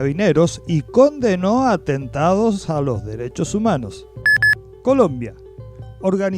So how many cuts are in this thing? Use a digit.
1